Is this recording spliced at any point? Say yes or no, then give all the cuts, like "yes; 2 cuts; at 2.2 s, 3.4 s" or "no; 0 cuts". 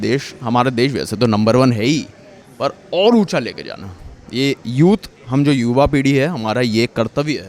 no; 0 cuts